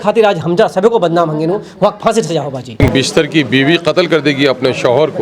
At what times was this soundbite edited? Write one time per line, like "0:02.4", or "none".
0:02.8